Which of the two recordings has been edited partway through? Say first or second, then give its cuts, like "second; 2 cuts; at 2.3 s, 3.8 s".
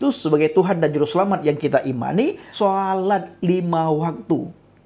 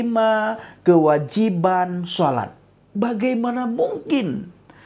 first; 1 cut; at 2.4 s